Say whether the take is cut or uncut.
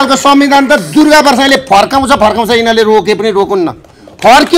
uncut